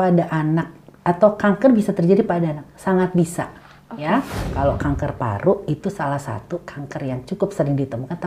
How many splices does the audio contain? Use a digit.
1